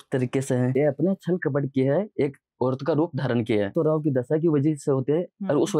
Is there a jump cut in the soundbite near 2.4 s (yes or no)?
no